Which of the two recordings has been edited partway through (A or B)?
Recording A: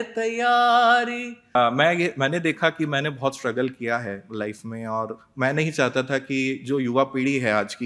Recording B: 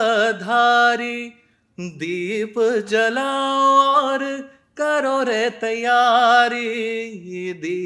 A